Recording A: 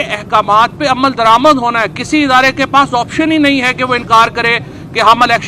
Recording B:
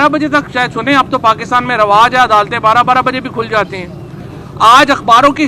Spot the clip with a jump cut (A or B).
B